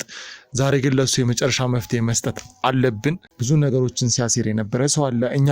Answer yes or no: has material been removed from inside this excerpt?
yes